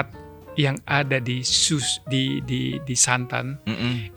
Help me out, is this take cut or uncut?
uncut